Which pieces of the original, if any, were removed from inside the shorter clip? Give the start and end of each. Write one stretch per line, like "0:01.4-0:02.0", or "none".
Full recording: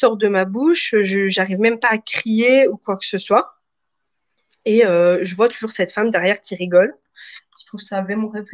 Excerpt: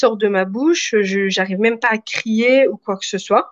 none

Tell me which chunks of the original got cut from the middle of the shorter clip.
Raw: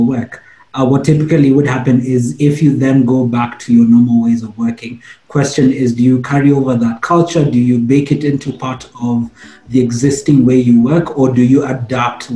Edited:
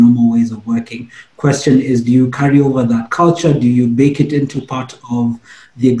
none

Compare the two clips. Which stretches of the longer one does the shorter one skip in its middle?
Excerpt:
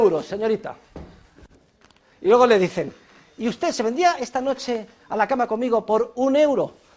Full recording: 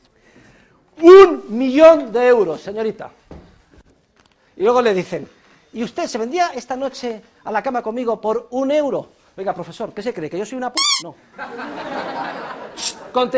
none

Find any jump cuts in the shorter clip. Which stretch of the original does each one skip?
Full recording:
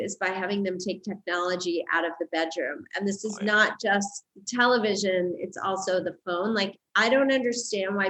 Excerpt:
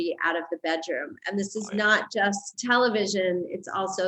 0:04.2-0:04.4

